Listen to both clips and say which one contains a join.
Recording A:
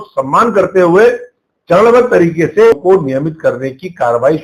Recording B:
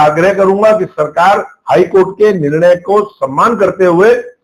A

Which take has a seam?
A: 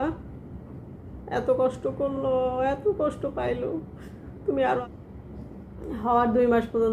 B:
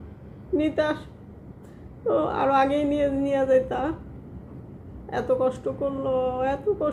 A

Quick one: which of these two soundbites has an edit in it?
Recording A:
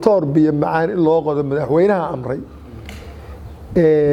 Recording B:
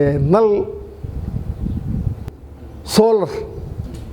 B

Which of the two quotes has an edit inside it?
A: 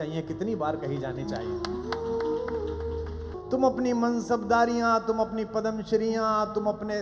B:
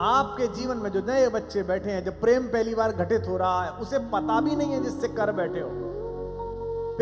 A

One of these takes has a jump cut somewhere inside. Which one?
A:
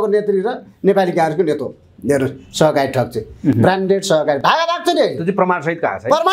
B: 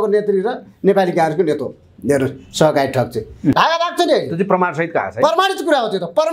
B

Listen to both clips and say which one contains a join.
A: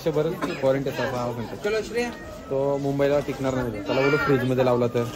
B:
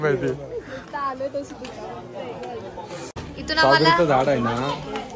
B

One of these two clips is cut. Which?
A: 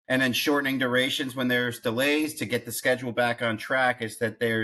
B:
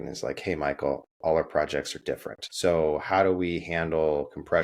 B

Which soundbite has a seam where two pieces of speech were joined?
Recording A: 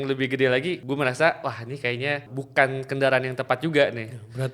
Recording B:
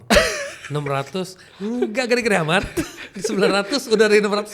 A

